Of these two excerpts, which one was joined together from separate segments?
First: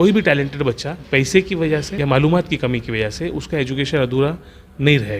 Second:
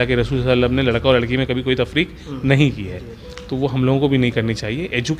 first; 2 cuts; at 0.9 s, 1.9 s

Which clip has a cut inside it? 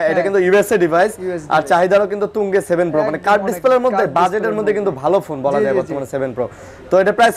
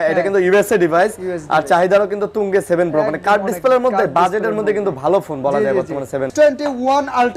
second; 1 cut; at 6.3 s

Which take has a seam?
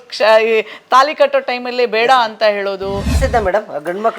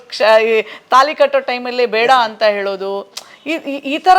first; 1 cut; at 3.1 s

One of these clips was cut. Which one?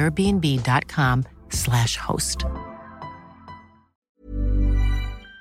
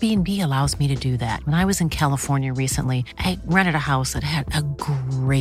first; 1 cut; at 4.1 s

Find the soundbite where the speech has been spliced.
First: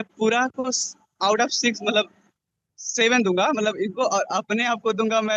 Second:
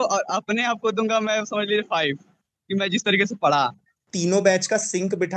second; 1 cut; at 4.1 s

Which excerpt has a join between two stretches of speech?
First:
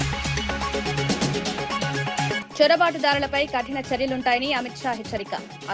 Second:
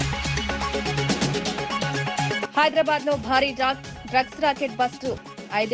second; 1 cut; at 2.4 s

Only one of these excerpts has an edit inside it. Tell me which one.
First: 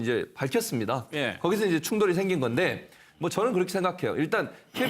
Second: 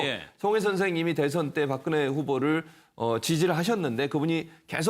first; 1 cut; at 4.0 s

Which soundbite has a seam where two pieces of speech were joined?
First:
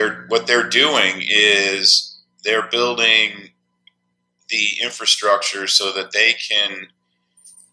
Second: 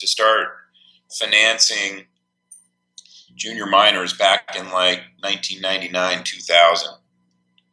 second; 1 cut; at 5.8 s

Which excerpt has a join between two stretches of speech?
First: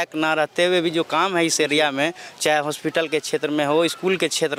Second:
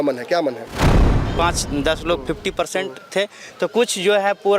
second; 1 cut; at 1.1 s

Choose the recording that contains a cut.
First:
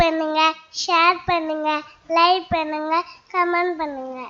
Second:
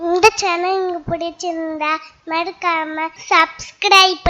second; 1 cut; at 3.2 s

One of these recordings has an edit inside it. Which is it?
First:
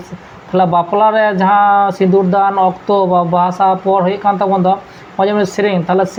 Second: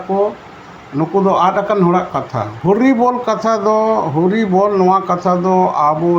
second; 1 cut; at 2.5 s

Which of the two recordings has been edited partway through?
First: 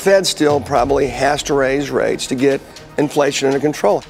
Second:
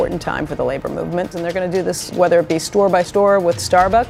second; 2 cuts; at 1.5 s, 3.1 s

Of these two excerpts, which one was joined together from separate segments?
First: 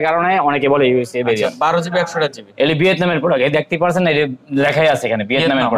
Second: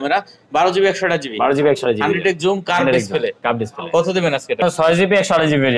second; 1 cut; at 4.6 s

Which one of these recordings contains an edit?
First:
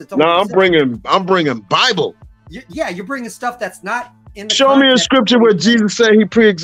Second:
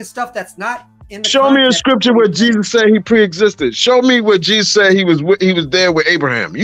first; 1 cut; at 2.3 s

